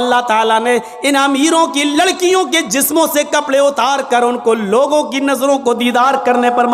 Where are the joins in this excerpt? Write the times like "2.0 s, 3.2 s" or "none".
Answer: none